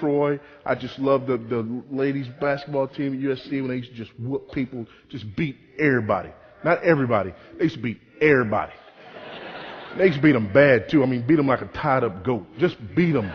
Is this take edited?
no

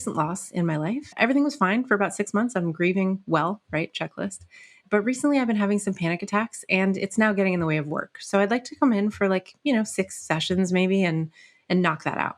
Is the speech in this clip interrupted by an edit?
yes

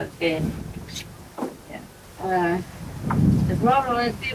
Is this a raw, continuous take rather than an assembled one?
no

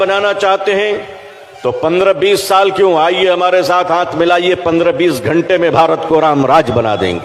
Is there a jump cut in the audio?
no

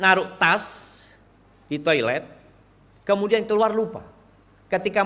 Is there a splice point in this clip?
no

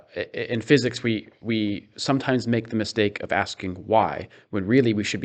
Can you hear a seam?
no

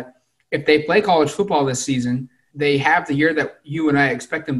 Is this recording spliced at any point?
yes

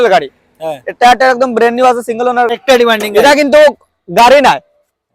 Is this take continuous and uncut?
no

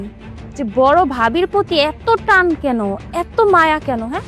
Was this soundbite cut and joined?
no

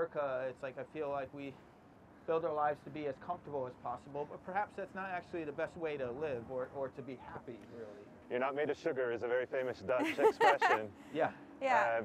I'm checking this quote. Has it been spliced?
no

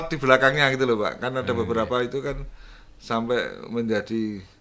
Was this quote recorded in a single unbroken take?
yes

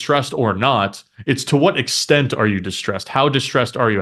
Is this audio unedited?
yes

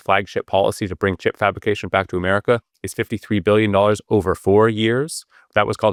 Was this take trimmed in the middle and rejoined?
no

